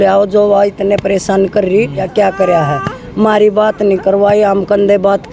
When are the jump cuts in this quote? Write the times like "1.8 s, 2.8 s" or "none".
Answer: 2.1 s

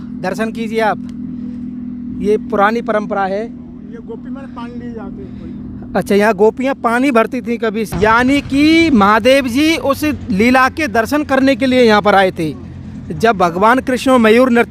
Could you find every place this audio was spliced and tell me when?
7.9 s

